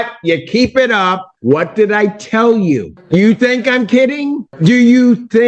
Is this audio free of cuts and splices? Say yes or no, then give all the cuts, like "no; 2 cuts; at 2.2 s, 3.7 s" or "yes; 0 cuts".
no; 3 cuts; at 1.3 s, 2.9 s, 4.5 s